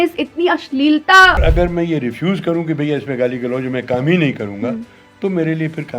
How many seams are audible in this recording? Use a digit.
1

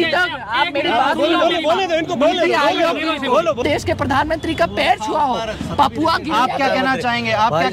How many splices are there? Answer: 1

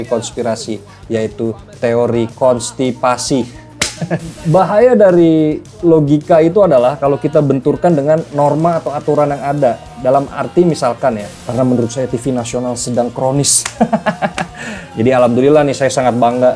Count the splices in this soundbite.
2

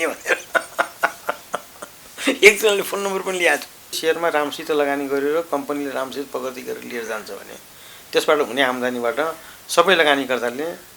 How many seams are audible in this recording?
1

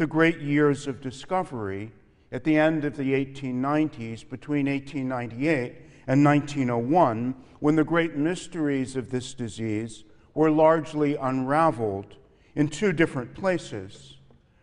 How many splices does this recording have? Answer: 1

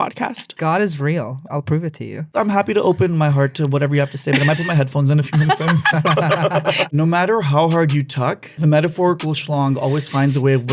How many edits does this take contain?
2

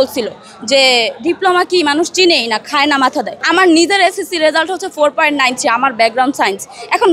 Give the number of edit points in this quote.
1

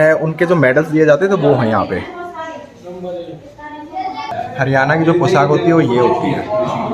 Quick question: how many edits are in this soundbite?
1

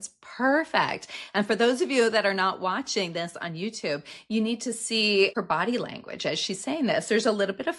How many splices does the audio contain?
1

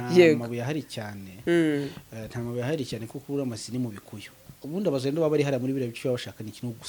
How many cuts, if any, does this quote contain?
1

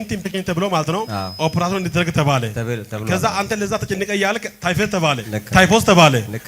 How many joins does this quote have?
3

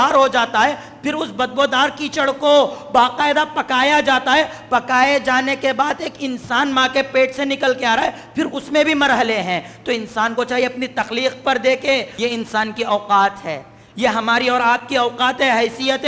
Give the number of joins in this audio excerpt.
1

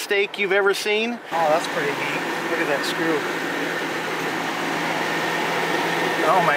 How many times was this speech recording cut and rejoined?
1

